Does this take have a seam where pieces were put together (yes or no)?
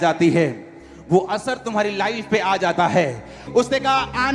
yes